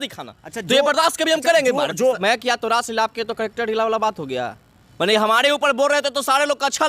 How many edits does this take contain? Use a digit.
1